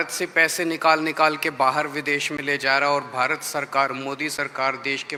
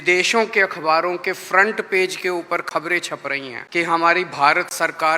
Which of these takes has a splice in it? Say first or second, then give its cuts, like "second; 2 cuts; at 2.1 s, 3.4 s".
second; 1 cut; at 3.6 s